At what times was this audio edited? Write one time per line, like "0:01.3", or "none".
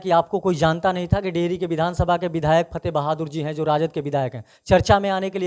none